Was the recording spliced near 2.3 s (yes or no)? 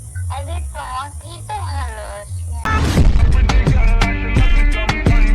no